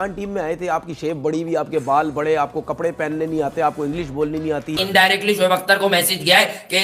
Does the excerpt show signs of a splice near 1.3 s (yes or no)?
no